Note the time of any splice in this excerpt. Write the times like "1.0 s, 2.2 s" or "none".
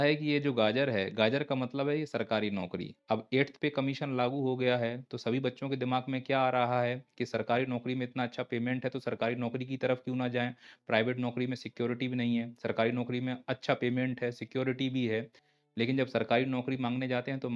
none